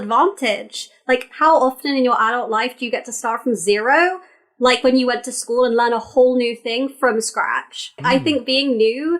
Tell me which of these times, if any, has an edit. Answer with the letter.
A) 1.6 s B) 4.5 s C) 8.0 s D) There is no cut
C